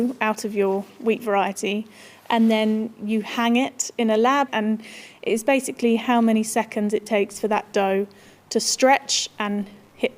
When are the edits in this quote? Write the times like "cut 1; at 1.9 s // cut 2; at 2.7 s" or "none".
cut 1; at 4.5 s